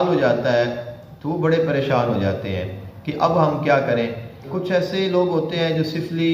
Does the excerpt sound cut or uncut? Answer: cut